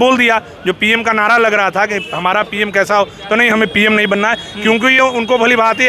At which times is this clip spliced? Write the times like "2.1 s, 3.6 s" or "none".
none